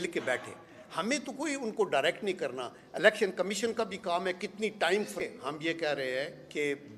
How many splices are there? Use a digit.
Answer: 0